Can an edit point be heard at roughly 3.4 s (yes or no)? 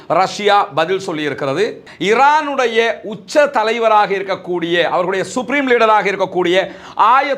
no